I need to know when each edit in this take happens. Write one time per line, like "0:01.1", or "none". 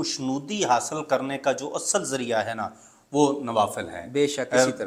none